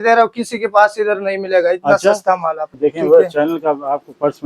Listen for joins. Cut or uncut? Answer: cut